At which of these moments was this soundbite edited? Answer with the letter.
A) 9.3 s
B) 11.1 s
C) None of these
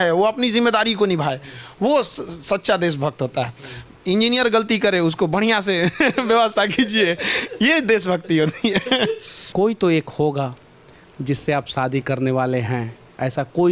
A